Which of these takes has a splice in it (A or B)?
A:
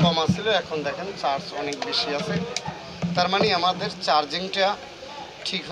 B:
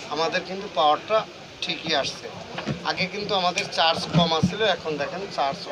A